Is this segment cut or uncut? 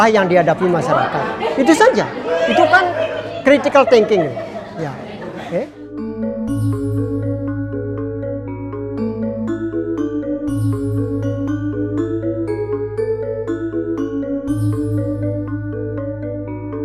uncut